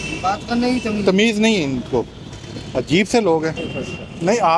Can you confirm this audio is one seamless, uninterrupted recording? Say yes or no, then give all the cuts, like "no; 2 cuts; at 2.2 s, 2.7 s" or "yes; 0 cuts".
no; 1 cut; at 3.7 s